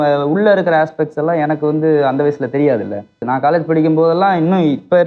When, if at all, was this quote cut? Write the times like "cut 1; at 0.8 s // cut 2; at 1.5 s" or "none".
cut 1; at 3.2 s